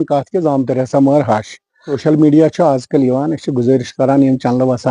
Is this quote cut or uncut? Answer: cut